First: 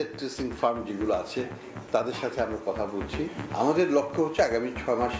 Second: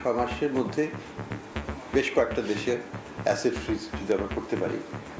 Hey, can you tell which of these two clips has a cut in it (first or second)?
first